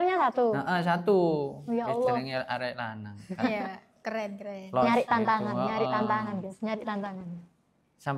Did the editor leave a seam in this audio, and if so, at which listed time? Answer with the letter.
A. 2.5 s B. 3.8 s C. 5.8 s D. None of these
D